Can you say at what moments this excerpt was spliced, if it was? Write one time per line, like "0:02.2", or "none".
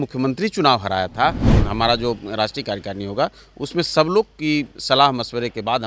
0:01.5